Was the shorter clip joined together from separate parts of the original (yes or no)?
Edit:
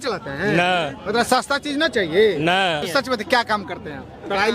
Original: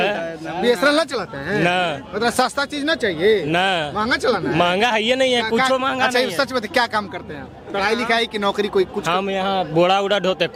yes